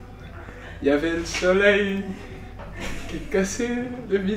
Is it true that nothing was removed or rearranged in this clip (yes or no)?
yes